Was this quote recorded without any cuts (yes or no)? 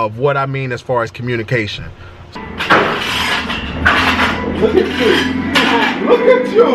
no